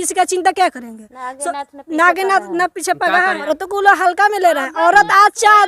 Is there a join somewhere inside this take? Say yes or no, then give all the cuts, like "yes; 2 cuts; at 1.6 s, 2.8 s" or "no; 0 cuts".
yes; 1 cut; at 3.5 s